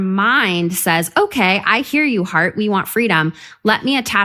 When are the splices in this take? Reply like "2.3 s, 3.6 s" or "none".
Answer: none